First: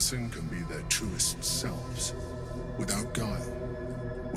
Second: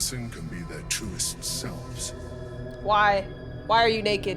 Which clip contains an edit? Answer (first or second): second